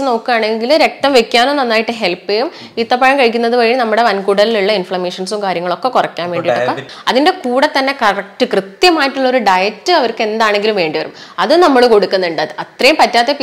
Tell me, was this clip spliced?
yes; 1 cut; at 6.9 s

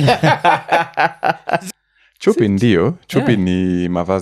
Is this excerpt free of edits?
no; 1 cut; at 1.7 s

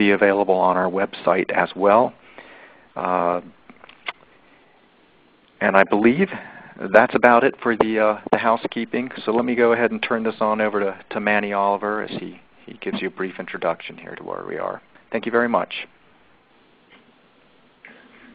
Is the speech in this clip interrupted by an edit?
yes; 1 cut; at 15.7 s

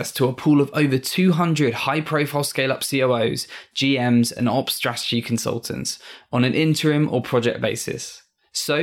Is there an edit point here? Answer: no; 0 cuts

